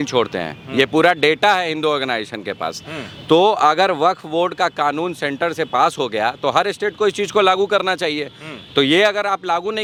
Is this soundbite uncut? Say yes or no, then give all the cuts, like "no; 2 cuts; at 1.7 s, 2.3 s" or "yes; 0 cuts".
yes; 0 cuts